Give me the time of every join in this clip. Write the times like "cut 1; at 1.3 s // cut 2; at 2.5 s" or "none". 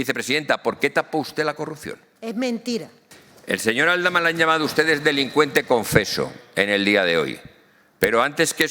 cut 1; at 3.3 s

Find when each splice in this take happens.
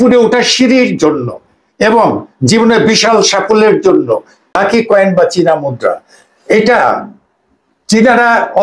cut 1; at 4.6 s

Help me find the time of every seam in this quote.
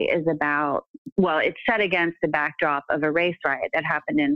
cut 1; at 1.1 s

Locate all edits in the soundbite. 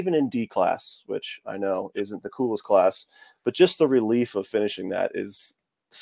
none

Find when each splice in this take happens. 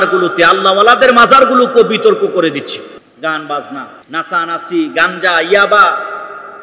cut 1; at 3.0 s // cut 2; at 4.0 s

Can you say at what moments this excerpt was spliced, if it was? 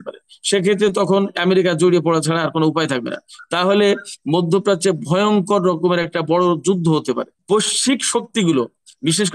cut 1; at 7.3 s

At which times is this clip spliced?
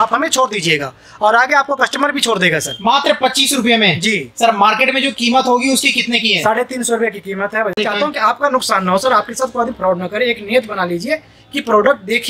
cut 1; at 2.7 s // cut 2; at 7.7 s

